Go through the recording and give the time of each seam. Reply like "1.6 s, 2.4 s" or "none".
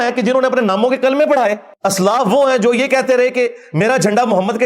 1.7 s